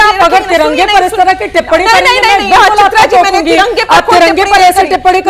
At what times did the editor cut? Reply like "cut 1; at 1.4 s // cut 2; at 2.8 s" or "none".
none